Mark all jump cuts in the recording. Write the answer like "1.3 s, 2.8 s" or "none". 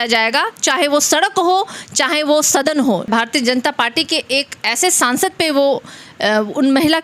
3.1 s